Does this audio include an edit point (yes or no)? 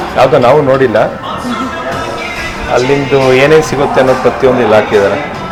no